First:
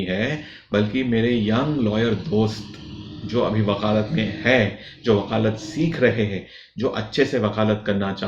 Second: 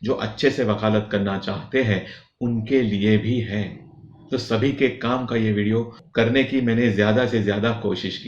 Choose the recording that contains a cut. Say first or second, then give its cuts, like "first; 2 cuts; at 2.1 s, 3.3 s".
second; 1 cut; at 6.0 s